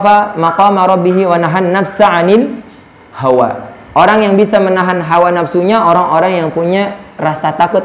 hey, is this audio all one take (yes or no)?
yes